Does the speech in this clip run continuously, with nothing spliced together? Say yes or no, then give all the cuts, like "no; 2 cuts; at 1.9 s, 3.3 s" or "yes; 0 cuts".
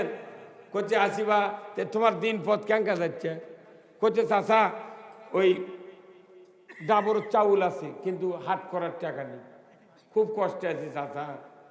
yes; 0 cuts